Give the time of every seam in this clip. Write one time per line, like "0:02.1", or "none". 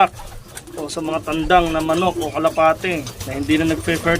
0:03.2